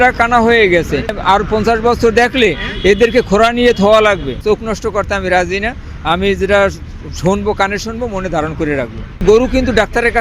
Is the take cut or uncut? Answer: cut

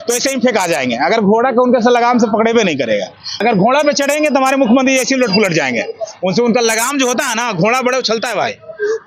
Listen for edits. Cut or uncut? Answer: uncut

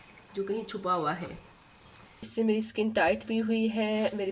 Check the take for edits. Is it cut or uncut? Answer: cut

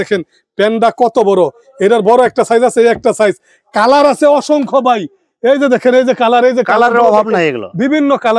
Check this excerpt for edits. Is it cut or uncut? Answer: uncut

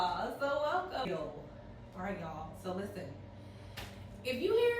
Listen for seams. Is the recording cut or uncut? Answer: cut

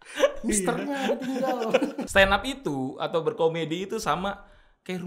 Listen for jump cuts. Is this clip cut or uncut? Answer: cut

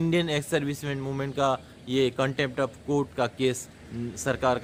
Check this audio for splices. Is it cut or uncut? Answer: uncut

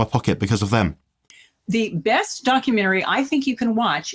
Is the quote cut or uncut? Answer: cut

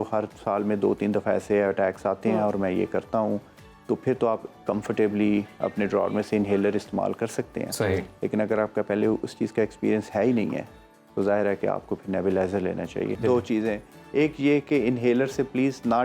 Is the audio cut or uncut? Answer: cut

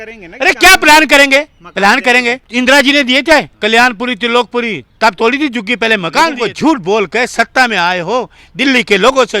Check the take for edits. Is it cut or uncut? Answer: cut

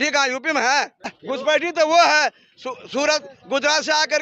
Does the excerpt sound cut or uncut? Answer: cut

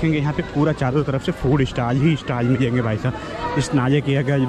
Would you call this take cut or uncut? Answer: uncut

